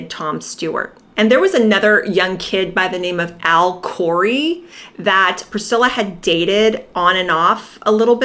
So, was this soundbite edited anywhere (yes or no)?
no